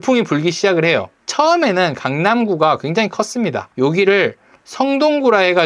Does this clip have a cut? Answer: yes; 2 cuts; at 1.2 s, 3.6 s

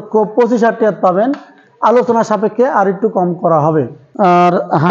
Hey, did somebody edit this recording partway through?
yes; 1 cut; at 4.0 s

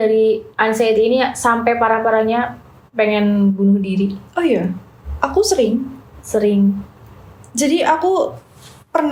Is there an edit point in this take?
no; 0 cuts

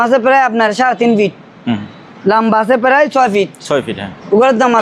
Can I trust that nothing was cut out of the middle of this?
yes; 0 cuts

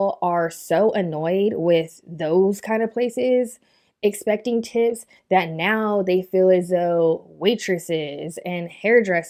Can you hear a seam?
no; 0 cuts

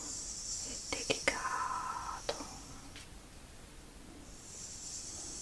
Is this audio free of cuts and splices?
yes; 0 cuts

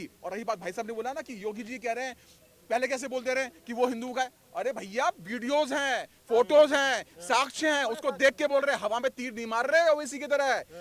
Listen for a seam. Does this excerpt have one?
no; 0 cuts

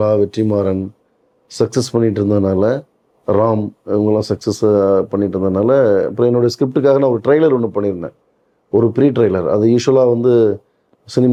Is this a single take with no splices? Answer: yes; 0 cuts

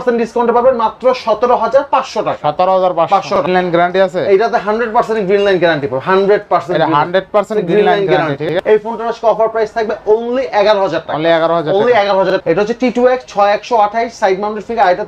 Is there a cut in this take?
yes; 3 cuts; at 3.4 s, 8.4 s, 12.3 s

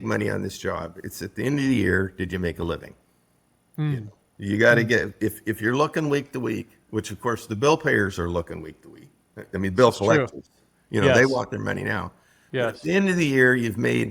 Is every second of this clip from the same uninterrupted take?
yes; 0 cuts

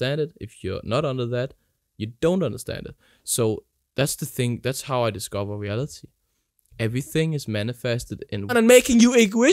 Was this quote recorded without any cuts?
no; 1 cut; at 8.5 s

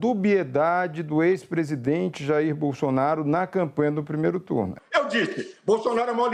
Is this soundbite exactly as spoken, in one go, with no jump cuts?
no; 1 cut; at 4.8 s

